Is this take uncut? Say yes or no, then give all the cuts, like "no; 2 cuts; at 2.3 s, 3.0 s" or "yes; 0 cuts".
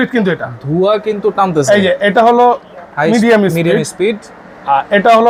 yes; 0 cuts